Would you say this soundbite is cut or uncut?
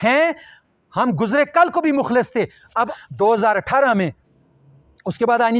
cut